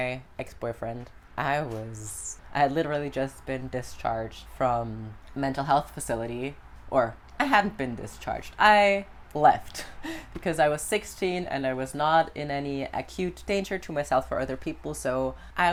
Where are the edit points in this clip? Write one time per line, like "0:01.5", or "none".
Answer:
none